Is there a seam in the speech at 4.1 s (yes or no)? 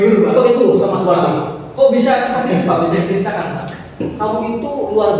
yes